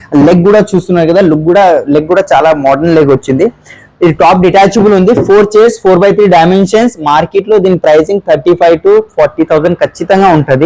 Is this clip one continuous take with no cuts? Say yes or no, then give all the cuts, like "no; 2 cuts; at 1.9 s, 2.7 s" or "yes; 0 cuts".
yes; 0 cuts